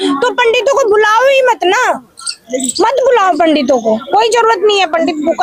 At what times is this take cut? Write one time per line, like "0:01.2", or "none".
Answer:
none